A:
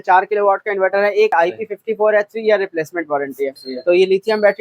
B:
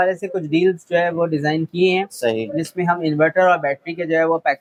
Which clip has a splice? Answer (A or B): A